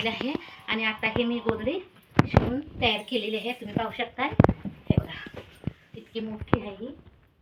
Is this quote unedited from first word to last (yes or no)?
yes